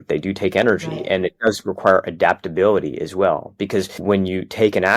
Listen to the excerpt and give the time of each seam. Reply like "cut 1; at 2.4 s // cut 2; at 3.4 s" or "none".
none